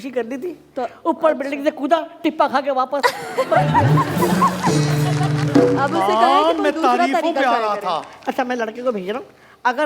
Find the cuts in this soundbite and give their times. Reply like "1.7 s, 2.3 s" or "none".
none